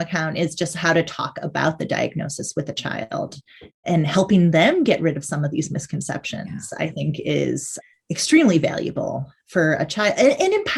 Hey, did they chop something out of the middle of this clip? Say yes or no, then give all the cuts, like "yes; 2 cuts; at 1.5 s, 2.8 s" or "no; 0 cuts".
no; 0 cuts